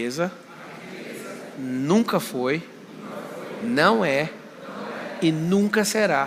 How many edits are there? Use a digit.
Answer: 0